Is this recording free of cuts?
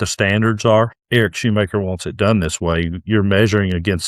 no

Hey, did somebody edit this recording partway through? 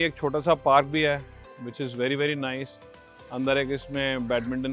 no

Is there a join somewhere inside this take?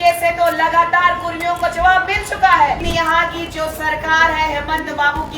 yes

